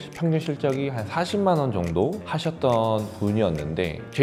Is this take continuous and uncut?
yes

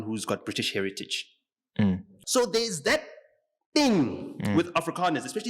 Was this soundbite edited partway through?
yes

